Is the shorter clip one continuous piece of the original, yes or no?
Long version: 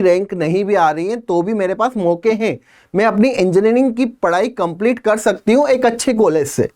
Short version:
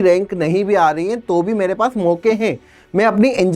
yes